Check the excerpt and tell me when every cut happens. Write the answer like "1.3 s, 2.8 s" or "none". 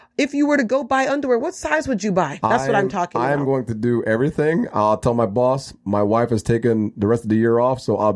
2.3 s